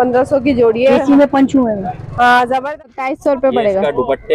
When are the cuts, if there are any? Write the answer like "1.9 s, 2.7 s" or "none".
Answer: 2.6 s